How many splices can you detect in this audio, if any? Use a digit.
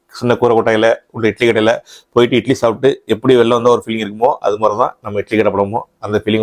0